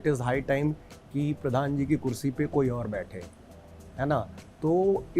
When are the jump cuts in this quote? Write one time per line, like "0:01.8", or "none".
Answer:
none